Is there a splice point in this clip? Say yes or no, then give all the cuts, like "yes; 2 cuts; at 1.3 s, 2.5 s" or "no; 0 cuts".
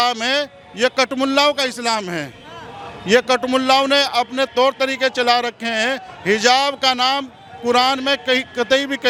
no; 0 cuts